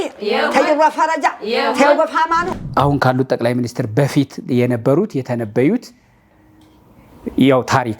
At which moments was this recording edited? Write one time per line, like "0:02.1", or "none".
0:02.5